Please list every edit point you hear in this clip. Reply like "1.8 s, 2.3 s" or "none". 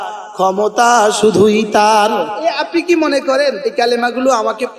2.3 s, 3.6 s